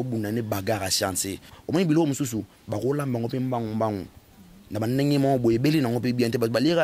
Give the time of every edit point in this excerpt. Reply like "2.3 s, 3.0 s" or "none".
1.5 s